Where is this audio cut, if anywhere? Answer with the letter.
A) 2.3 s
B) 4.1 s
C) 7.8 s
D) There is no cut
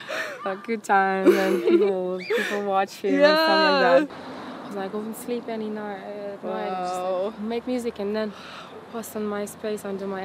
B